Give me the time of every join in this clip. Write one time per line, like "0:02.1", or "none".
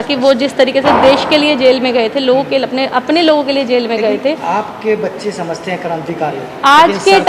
none